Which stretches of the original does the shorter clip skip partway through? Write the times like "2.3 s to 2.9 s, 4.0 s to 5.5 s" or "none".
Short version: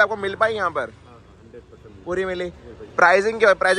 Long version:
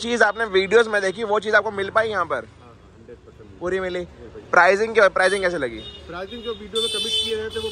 none